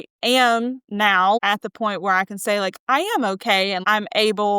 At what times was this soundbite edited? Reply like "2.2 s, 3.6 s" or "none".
1.4 s, 3.8 s